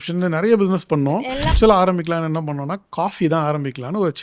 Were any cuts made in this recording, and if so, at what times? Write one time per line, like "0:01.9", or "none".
0:01.5